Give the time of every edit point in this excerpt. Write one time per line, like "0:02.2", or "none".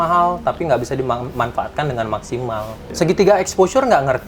0:02.8